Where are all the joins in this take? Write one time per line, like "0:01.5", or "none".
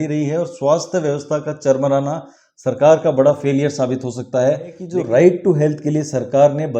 0:04.8